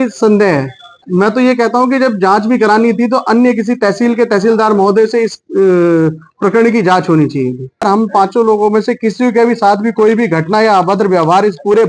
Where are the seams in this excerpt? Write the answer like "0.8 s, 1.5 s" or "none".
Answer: 1.0 s, 7.8 s